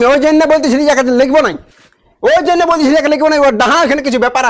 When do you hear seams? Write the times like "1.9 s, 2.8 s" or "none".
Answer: none